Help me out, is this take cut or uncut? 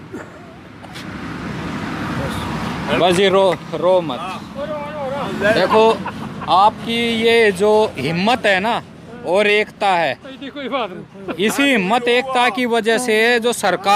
uncut